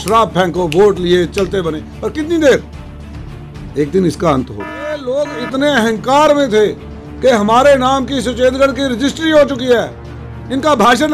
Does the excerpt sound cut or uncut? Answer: cut